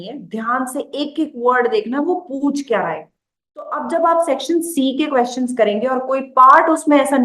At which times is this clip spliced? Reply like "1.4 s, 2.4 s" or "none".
3.8 s